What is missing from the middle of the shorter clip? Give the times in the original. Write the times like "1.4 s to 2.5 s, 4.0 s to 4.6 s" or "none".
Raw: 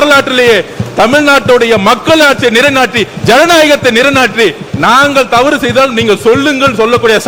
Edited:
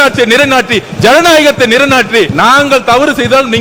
4.6 s to 4.8 s